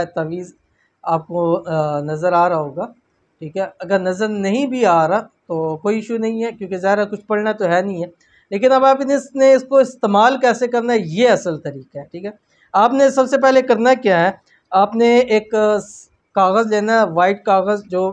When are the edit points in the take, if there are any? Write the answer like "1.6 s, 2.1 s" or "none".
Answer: none